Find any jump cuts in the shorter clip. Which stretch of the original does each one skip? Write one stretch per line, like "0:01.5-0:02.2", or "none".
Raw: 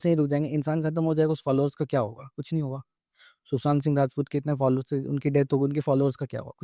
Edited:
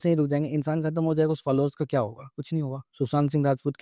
0:02.8-0:03.3